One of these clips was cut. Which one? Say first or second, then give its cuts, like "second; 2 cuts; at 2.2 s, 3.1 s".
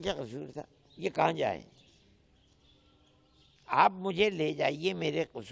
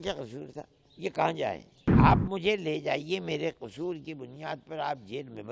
second; 1 cut; at 1.8 s